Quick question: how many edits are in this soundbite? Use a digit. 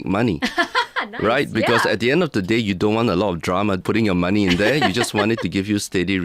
1